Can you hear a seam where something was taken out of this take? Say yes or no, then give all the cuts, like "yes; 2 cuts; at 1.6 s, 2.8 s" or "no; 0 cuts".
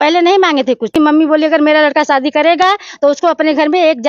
yes; 1 cut; at 0.9 s